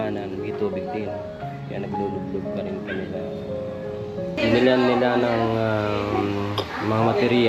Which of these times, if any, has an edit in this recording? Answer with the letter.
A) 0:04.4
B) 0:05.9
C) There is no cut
A